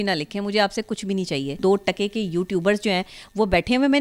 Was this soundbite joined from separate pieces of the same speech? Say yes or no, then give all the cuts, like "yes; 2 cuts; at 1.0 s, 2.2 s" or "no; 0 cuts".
yes; 1 cut; at 1.6 s